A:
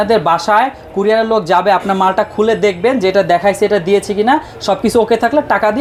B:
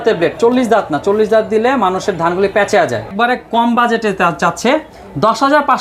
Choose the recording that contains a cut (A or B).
B